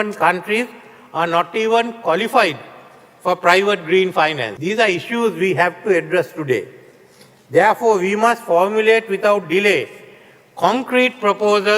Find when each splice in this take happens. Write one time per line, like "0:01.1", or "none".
none

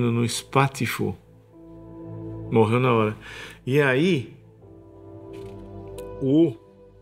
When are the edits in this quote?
none

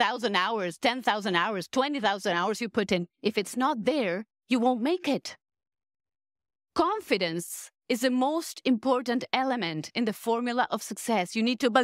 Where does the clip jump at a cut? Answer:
none

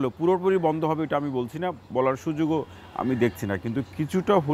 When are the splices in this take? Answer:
none

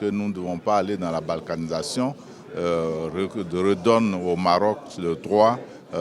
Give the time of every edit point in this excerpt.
none

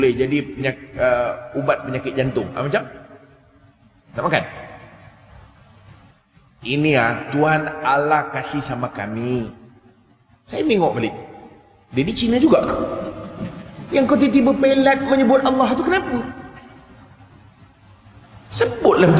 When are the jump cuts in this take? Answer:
0:06.1

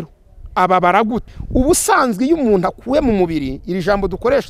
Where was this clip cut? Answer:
0:01.4

